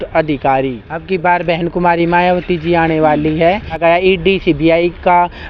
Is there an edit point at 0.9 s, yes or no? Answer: yes